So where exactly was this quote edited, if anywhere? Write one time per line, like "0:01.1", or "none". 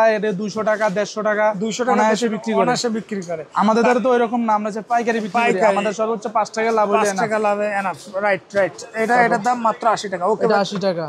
none